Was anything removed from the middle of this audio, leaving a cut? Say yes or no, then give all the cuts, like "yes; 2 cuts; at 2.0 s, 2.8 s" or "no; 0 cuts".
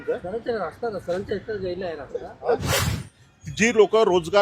yes; 1 cut; at 2.9 s